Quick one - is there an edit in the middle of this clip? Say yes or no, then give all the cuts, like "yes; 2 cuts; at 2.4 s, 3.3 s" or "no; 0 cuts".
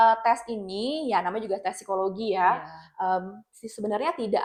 no; 0 cuts